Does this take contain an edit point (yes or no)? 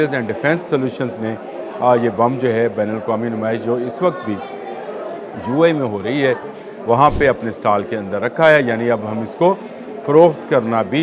no